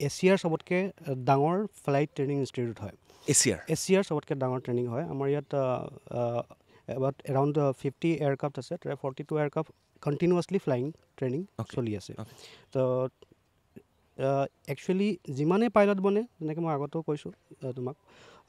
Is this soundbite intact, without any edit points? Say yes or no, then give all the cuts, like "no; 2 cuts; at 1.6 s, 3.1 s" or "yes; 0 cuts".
yes; 0 cuts